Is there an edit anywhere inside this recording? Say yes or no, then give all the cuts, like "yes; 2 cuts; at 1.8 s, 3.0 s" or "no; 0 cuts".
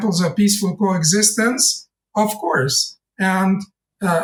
no; 0 cuts